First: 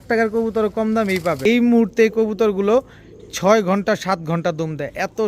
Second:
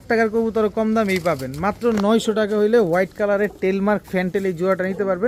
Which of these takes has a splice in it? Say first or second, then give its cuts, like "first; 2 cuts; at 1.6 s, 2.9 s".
first; 1 cut; at 1.4 s